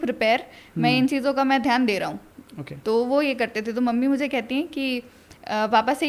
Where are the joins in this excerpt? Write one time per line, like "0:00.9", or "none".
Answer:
none